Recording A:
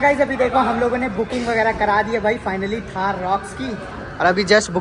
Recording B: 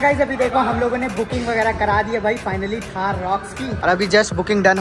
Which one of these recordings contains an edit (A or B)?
B